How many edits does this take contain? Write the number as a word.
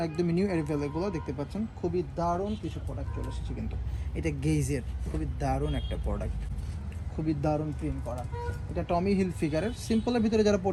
zero